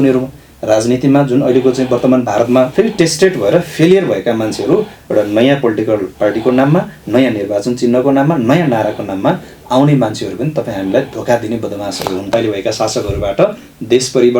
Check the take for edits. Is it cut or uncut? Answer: cut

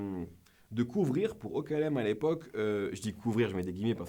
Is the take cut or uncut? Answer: uncut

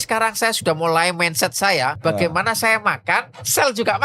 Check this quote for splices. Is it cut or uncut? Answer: cut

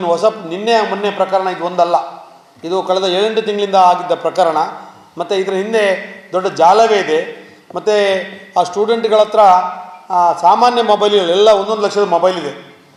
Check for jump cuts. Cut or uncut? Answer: uncut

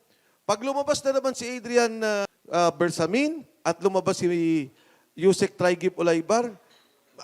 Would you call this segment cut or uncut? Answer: cut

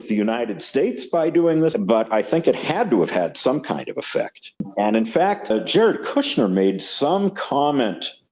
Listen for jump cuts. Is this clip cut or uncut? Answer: cut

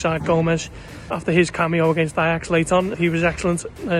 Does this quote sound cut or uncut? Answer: cut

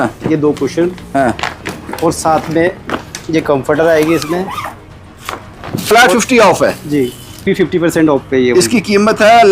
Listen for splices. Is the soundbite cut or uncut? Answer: cut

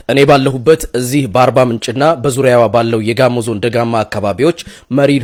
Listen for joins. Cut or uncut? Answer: uncut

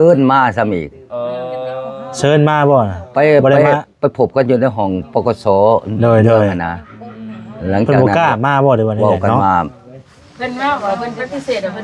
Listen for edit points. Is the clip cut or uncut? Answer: uncut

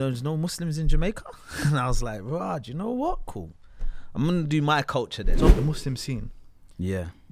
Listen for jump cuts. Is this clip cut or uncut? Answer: cut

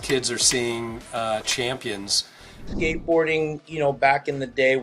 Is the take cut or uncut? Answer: cut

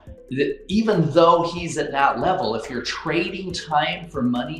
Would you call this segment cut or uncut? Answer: uncut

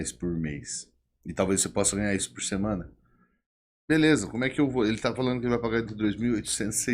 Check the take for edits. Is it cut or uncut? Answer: cut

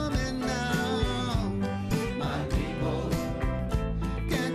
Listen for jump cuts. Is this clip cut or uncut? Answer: cut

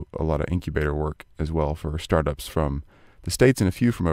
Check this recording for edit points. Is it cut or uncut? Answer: uncut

